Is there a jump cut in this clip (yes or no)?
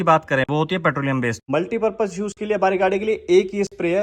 yes